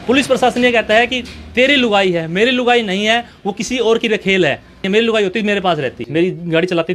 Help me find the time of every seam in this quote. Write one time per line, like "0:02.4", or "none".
0:04.8
0:06.0